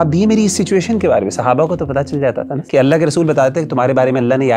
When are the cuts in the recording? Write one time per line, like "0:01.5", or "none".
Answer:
0:02.5